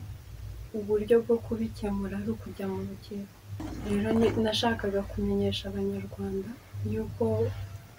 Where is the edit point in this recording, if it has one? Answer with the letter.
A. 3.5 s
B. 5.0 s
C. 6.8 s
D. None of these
A